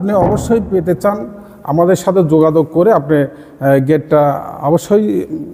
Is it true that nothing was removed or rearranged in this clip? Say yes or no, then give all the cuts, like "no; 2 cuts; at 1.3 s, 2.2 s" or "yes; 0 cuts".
yes; 0 cuts